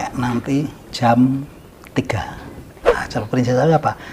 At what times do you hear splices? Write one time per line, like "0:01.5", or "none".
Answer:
0:02.9